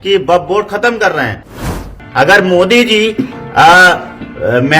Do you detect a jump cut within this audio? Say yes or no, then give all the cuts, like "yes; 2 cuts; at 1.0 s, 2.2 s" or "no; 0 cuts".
yes; 1 cut; at 1.7 s